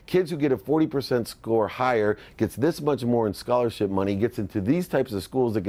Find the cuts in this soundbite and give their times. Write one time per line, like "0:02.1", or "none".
none